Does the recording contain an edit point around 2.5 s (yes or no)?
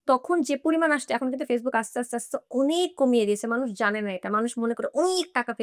no